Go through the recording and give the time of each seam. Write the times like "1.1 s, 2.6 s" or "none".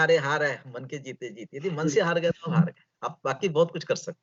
none